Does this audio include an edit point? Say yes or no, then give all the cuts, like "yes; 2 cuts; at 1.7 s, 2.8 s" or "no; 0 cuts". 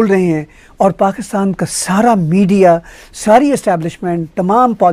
no; 0 cuts